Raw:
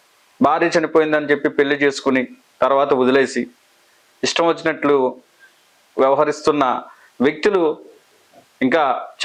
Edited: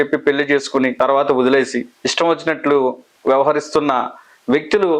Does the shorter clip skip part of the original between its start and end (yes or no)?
yes